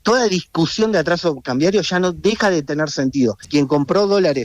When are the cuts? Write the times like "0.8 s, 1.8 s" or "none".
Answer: 3.4 s